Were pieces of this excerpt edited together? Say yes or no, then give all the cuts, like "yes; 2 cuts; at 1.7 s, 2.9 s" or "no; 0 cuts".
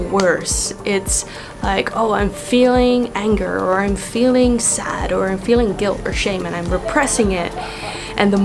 no; 0 cuts